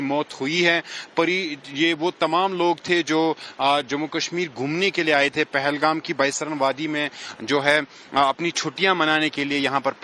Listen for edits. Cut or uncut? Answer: cut